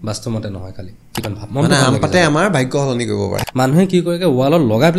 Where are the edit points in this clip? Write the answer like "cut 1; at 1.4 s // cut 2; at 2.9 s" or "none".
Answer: cut 1; at 1.2 s // cut 2; at 3.4 s